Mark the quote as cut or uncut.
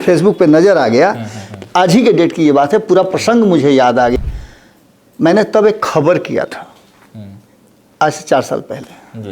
cut